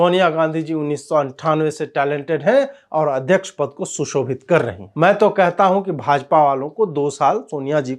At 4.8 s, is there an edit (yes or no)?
no